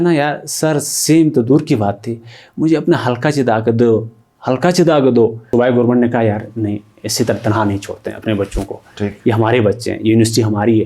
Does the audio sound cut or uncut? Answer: cut